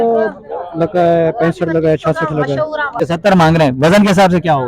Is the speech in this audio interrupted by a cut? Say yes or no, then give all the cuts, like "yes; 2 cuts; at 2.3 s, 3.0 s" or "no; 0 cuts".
yes; 1 cut; at 2.9 s